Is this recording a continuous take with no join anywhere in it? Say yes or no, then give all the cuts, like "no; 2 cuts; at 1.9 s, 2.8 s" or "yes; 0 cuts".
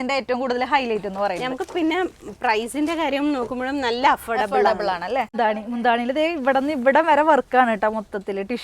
no; 1 cut; at 5.3 s